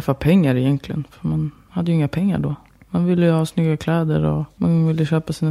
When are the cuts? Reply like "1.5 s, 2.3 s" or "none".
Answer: 4.5 s